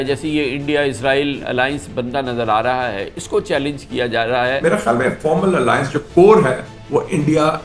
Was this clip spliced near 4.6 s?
yes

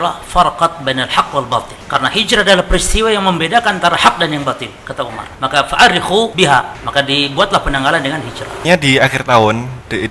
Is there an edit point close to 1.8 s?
yes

